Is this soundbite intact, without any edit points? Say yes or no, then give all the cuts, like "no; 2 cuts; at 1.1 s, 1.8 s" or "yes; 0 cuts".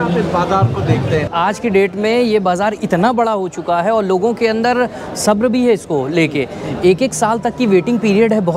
no; 1 cut; at 1.3 s